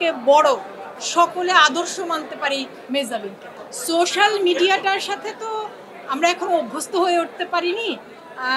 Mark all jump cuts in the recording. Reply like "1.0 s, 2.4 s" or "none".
3.5 s